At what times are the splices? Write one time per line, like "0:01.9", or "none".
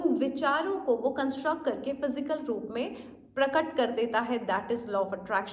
none